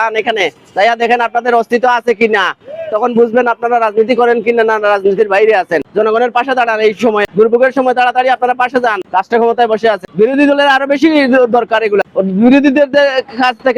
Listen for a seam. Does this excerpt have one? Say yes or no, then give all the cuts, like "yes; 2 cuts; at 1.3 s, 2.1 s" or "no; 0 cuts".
yes; 5 cuts; at 5.9 s, 7.2 s, 9.0 s, 10.0 s, 12.0 s